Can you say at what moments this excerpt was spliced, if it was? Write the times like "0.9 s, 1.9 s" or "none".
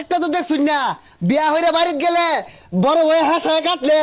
none